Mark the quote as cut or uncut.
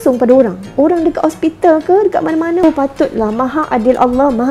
cut